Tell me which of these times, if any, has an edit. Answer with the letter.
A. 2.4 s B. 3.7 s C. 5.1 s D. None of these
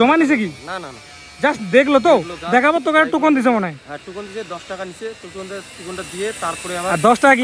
D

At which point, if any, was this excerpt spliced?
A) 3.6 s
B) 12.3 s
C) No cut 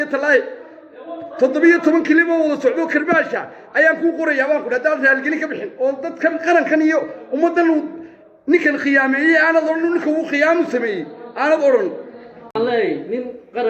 B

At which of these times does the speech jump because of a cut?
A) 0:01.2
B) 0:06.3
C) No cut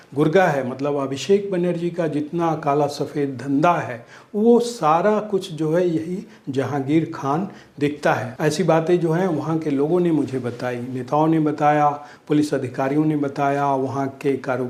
C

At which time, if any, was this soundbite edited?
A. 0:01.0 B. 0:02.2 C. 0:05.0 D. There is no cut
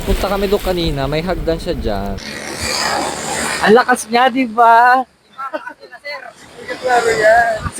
B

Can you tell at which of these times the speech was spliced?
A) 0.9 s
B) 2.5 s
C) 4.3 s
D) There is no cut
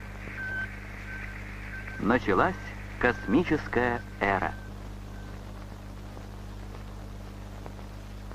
D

